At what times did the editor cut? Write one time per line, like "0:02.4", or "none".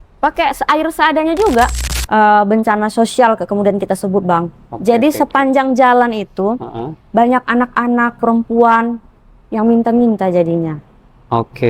0:01.9